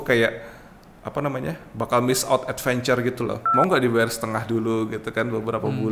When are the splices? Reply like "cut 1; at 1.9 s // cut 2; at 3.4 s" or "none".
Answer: cut 1; at 3.5 s